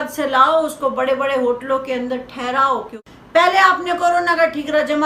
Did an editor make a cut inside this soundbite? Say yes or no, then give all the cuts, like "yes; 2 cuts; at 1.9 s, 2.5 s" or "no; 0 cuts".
yes; 1 cut; at 3.0 s